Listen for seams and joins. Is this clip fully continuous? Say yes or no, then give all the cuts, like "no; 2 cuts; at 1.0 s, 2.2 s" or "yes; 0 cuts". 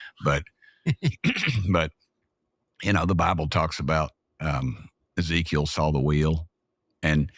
yes; 0 cuts